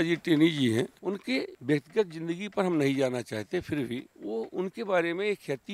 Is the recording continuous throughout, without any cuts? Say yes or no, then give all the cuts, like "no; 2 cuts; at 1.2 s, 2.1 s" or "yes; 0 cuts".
no; 1 cut; at 1.0 s